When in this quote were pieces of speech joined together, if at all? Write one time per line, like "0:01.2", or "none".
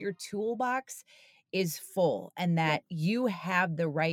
0:02.9